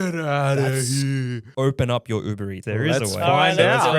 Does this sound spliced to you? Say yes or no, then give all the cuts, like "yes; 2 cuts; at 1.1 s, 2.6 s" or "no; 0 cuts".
yes; 2 cuts; at 1.4 s, 2.6 s